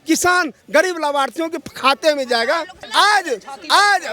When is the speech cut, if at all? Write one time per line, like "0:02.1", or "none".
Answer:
0:02.8

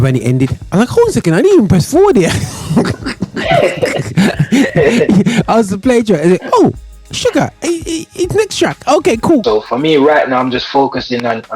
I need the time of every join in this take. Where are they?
0:09.4

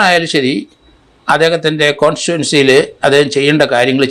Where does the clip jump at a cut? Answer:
none

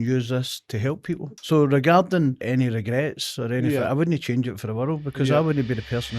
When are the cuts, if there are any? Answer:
0:01.3
0:02.4

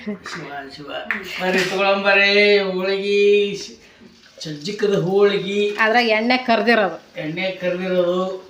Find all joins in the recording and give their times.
none

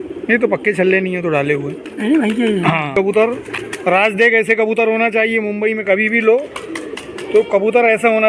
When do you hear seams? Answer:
0:02.9

